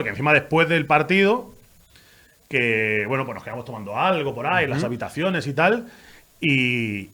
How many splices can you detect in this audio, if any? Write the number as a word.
zero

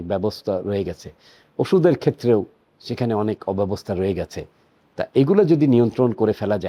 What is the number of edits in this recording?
zero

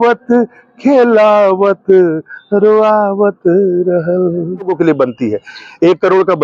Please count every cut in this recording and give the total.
one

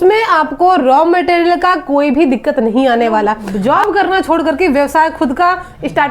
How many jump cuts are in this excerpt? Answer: one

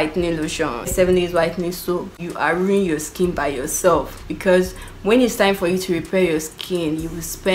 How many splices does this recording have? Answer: one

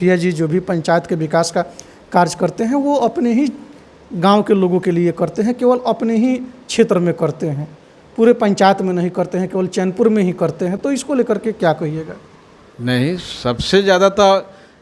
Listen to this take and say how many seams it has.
zero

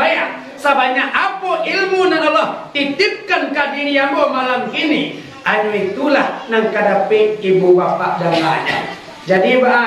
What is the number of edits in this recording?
zero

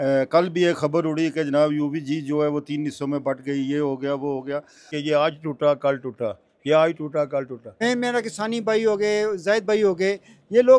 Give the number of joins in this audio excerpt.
two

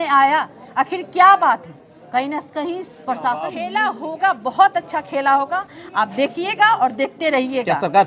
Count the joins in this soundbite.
one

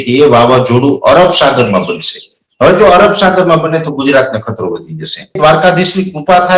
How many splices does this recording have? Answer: one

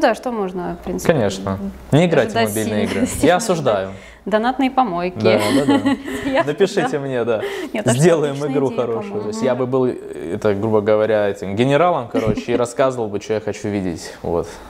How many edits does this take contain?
two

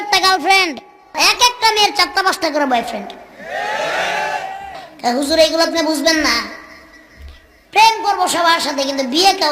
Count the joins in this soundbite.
two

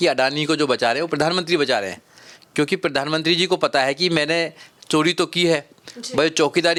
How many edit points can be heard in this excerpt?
zero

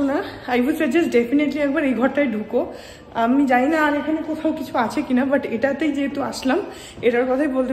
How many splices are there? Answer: zero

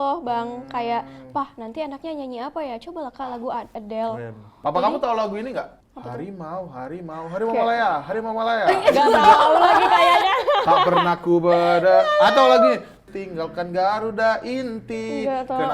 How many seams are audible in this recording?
three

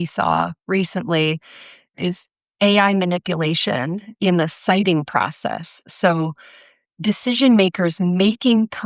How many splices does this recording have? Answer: one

